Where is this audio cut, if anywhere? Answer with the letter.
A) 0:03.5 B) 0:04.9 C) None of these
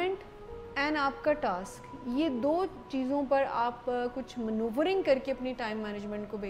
C